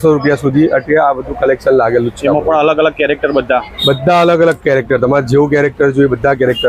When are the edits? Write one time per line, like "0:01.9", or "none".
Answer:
none

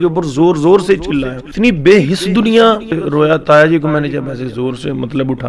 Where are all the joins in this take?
0:01.4
0:02.9

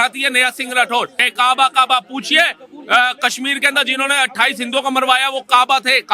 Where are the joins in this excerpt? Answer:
0:01.2

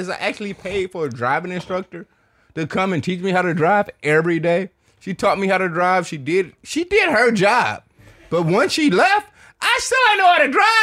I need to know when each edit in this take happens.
none

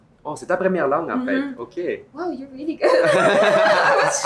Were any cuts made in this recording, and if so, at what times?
none

